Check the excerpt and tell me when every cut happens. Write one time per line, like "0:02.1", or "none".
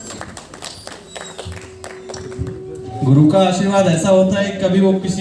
0:02.8